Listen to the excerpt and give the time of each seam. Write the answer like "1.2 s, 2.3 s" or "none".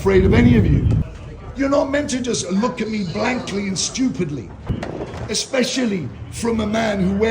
1.1 s, 4.8 s